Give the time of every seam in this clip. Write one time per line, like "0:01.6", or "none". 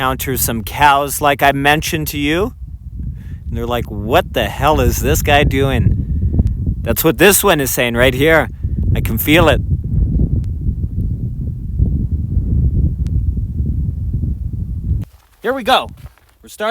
0:15.0